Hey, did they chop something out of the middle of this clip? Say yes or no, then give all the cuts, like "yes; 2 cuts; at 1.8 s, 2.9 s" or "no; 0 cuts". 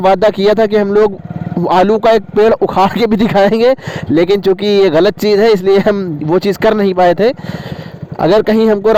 no; 0 cuts